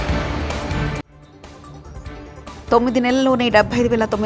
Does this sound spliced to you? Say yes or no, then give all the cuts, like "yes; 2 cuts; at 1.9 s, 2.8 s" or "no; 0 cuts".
yes; 1 cut; at 2.5 s